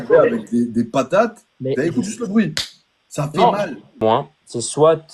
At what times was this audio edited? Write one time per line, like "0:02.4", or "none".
0:04.0